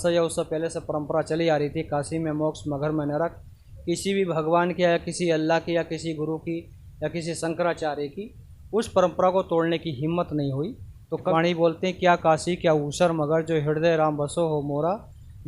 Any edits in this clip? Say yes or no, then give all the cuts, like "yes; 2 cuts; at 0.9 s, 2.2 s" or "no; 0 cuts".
yes; 1 cut; at 11.2 s